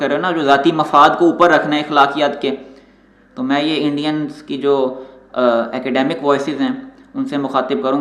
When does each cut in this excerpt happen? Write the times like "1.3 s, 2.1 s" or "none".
none